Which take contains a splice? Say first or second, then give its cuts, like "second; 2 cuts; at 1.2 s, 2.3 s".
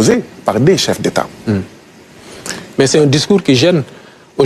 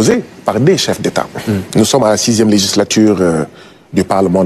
second; 1 cut; at 1.6 s